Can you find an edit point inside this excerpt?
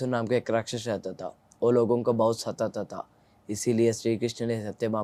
no; 0 cuts

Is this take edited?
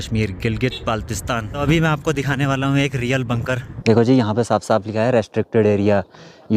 yes; 2 cuts; at 1.6 s, 3.7 s

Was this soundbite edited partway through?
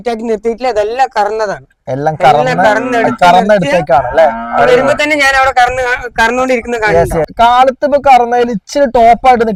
no; 0 cuts

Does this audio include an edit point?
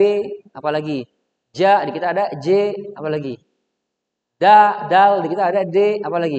no; 0 cuts

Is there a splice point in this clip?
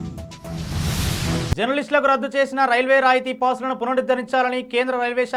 no; 0 cuts

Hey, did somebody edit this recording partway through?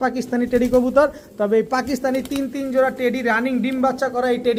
no; 0 cuts

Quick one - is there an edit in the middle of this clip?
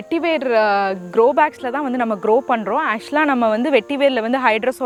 no; 0 cuts

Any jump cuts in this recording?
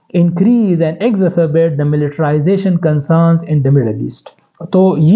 no; 0 cuts

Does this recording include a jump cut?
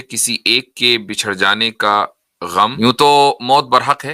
yes; 1 cut; at 2.7 s

